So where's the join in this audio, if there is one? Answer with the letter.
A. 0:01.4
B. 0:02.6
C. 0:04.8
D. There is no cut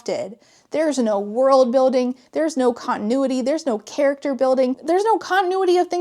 C